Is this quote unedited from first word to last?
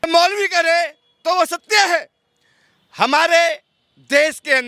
yes; 0 cuts

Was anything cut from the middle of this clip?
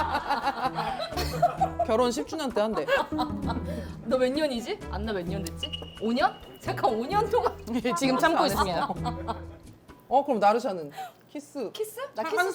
no; 0 cuts

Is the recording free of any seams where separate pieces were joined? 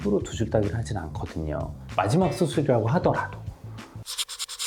yes; 0 cuts

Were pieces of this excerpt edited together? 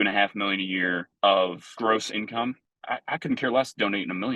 yes; 3 cuts; at 1.1 s, 1.7 s, 2.7 s

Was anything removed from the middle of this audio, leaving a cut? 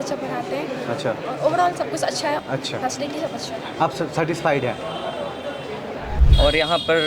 yes; 2 cuts; at 2.4 s, 6.2 s

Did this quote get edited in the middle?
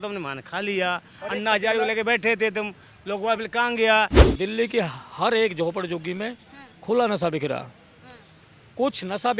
yes; 1 cut; at 4.2 s

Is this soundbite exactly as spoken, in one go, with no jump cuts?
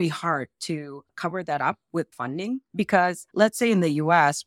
no; 1 cut; at 2.7 s

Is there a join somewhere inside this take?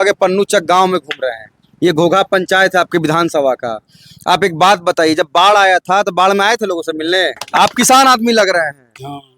yes; 1 cut; at 7.4 s

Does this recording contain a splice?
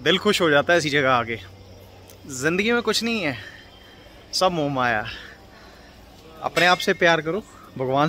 no; 0 cuts

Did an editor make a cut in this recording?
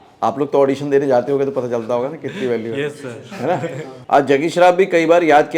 yes; 1 cut; at 3.9 s

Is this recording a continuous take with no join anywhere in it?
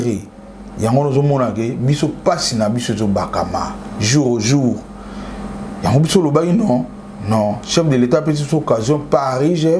yes; 0 cuts

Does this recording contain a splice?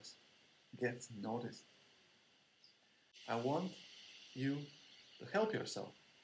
yes; 1 cut; at 3.1 s

